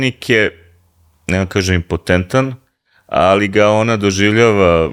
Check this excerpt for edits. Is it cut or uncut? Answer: uncut